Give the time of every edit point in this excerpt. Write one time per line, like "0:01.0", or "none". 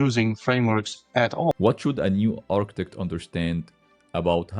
0:01.5